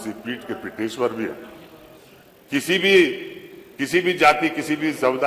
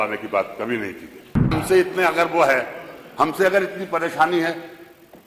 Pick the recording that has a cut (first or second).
second